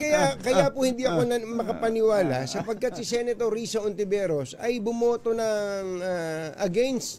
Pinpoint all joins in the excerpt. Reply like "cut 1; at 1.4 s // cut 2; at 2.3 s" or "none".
cut 1; at 1.5 s